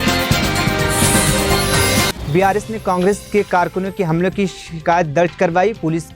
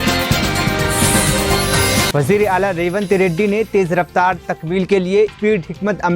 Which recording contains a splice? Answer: first; 1 cut; at 2.1 s

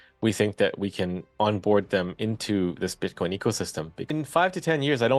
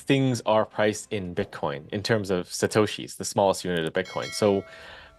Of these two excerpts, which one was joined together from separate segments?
first; 1 cut; at 4.0 s

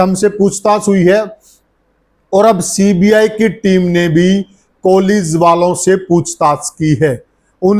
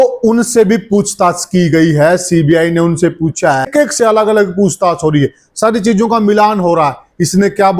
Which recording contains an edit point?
second; 1 cut; at 3.7 s

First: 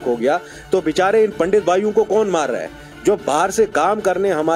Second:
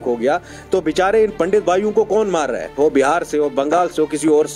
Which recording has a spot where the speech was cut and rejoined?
second; 1 cut; at 2.8 s

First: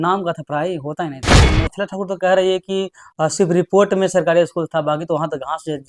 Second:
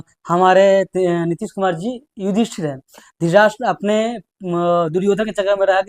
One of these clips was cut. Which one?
first; 1 cut; at 1.4 s

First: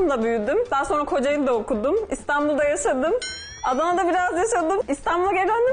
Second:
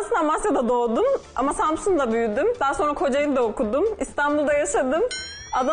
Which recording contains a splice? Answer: first; 1 cut; at 4.8 s

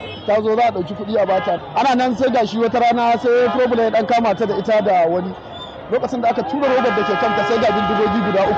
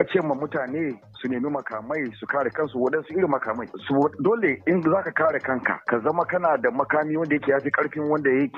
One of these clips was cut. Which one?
first; 1 cut; at 1.6 s

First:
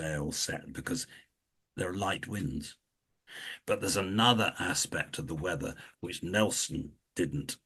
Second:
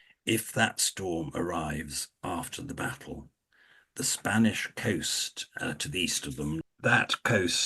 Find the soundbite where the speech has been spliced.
second; 1 cut; at 6.6 s

